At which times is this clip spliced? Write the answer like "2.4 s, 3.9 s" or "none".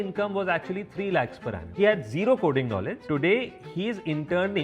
1.7 s, 3.0 s